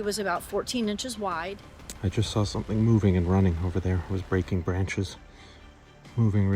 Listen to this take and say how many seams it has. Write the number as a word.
one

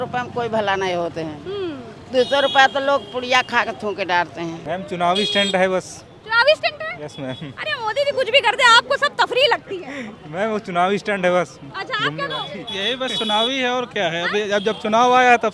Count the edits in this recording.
zero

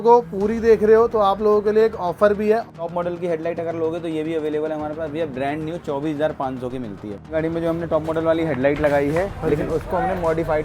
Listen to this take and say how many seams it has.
two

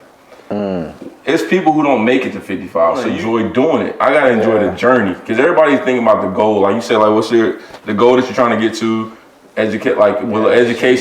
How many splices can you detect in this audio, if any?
one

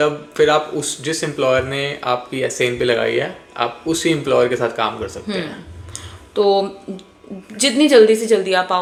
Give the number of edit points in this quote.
zero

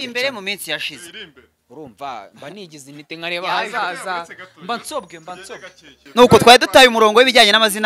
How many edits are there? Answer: one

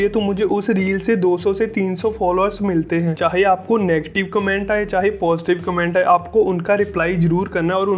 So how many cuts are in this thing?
one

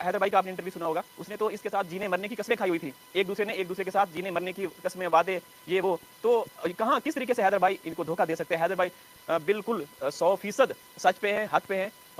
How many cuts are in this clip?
zero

